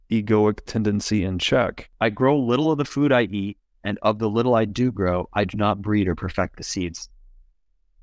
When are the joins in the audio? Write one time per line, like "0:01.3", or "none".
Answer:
0:01.8